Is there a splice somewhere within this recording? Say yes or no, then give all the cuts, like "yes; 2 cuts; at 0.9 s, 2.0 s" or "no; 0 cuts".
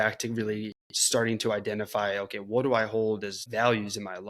yes; 1 cut; at 3.4 s